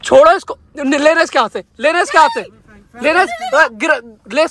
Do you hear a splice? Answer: no; 0 cuts

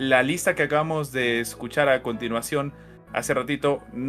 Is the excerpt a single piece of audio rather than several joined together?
yes; 0 cuts

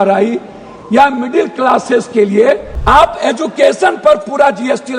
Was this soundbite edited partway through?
yes; 1 cut; at 2.7 s

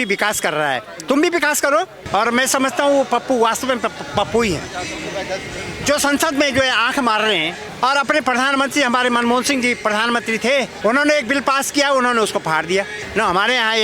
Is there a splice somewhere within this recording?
yes; 4 cuts; at 2.0 s, 7.6 s, 10.7 s, 13.0 s

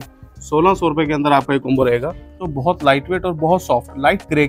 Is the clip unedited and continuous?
no; 1 cut; at 2.5 s

